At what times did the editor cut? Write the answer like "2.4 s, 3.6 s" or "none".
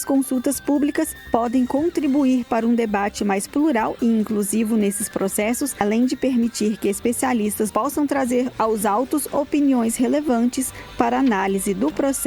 5.8 s, 7.7 s